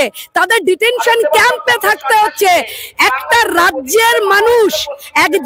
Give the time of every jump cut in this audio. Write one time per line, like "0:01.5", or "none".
none